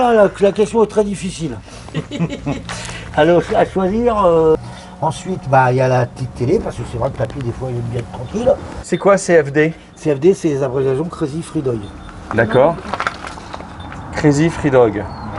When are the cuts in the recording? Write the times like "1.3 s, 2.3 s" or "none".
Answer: 4.6 s, 8.8 s